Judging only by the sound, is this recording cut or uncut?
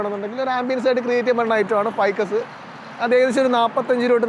uncut